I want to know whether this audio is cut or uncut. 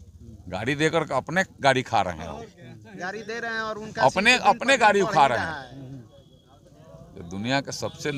uncut